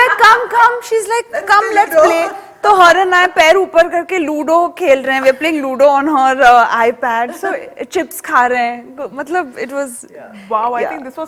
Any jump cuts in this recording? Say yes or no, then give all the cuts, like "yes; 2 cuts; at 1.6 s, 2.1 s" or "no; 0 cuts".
no; 0 cuts